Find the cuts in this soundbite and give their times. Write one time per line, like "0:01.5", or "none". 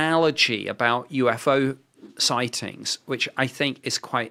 none